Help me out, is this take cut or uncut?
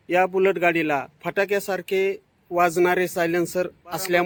uncut